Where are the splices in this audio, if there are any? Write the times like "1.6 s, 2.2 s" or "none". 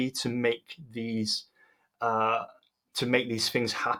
none